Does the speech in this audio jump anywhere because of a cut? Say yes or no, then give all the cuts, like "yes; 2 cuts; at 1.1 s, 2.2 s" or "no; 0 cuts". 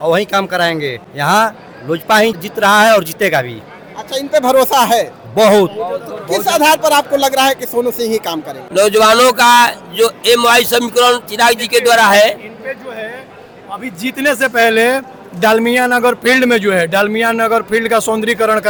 no; 0 cuts